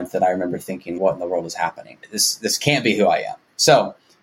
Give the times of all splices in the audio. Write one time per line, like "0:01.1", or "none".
none